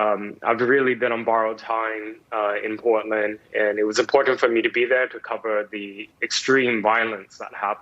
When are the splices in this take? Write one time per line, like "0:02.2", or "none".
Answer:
none